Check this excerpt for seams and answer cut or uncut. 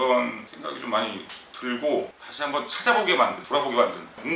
cut